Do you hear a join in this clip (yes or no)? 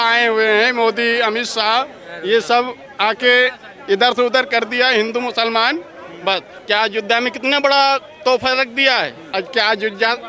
yes